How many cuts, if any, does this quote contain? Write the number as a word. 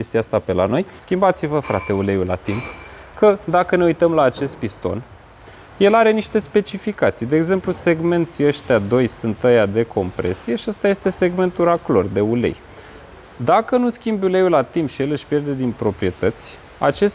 one